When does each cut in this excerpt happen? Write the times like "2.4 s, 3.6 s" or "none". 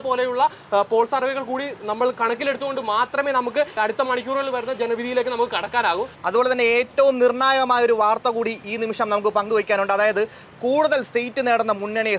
3.8 s, 6.1 s